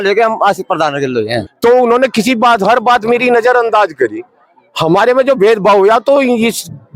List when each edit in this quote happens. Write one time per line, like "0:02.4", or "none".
0:01.4

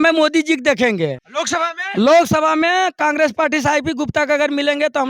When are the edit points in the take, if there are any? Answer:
0:01.3

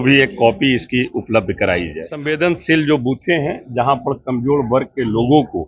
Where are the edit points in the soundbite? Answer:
0:02.2

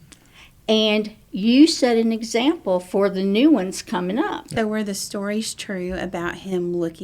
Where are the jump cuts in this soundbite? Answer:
0:04.5

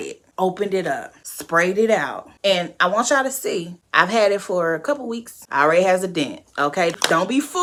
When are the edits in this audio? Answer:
none

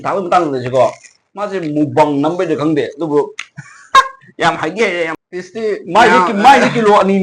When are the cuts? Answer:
0:05.2

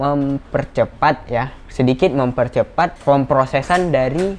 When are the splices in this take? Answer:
0:03.0

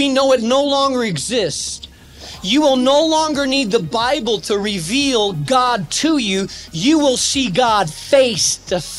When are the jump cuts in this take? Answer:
none

